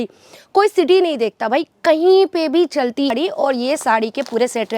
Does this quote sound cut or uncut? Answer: cut